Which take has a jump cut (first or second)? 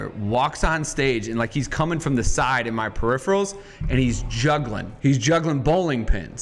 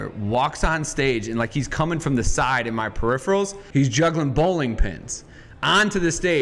second